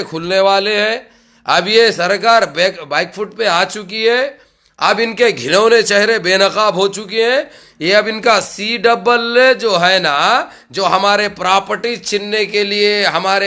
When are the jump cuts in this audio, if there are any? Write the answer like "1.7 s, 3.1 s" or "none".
none